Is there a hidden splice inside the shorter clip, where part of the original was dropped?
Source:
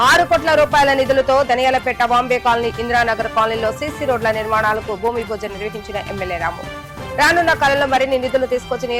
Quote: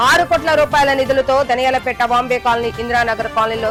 no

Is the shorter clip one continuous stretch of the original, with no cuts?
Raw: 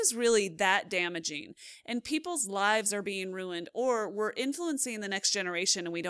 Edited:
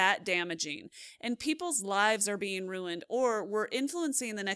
yes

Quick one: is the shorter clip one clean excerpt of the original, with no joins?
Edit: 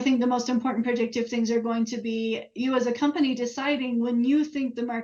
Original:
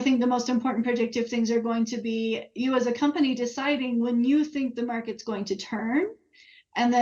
yes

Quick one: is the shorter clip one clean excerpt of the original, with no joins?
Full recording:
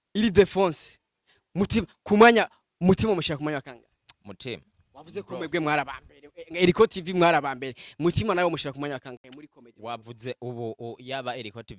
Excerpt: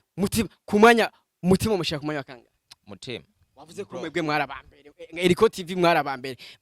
yes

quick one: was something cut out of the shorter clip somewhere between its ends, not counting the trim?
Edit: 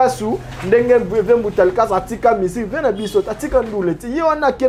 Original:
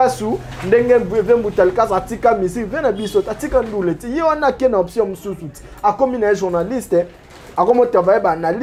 no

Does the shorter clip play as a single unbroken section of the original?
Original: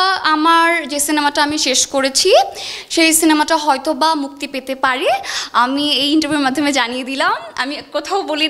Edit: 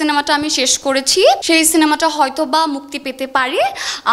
no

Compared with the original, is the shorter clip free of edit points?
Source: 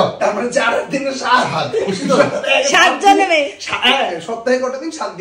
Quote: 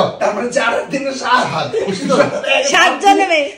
yes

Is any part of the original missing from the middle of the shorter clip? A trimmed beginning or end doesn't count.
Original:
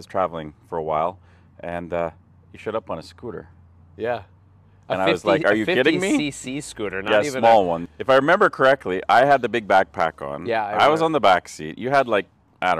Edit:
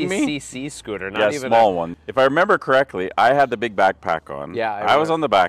no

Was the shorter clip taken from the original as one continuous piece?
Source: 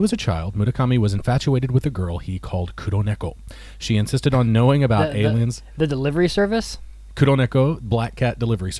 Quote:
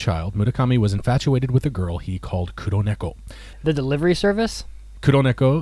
no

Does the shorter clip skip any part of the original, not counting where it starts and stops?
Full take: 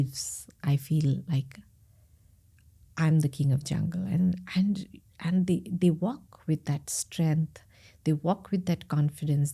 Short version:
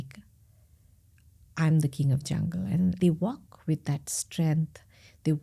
yes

